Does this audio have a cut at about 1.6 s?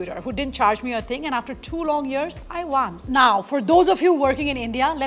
no; 1 cut; at 3.0 s

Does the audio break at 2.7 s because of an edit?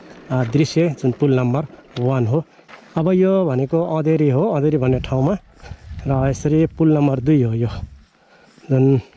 yes; 1 cut; at 2.7 s

